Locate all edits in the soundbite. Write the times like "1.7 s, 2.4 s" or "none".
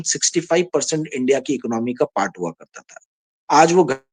none